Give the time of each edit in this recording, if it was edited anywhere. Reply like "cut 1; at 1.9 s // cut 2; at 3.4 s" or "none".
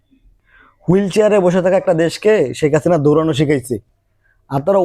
none